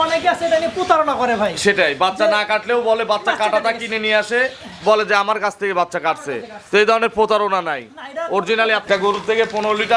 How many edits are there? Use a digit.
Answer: 1